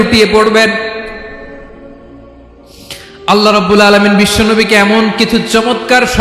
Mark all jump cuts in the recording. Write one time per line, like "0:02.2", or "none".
none